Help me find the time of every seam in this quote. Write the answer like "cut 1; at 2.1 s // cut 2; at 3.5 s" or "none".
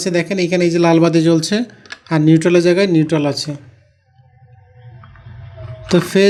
none